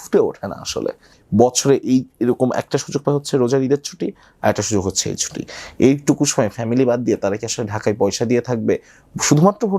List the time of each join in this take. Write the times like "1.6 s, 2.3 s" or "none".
1.1 s